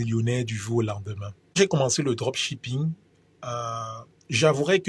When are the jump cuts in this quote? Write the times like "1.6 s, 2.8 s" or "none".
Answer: 1.6 s